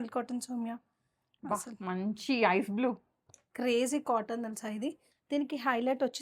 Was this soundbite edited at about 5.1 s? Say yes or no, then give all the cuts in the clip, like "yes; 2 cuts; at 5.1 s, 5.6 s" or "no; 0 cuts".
yes; 1 cut; at 5.1 s